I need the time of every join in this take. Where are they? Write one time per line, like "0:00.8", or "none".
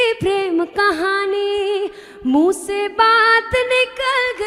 none